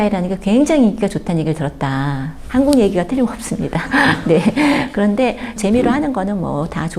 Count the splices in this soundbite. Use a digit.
1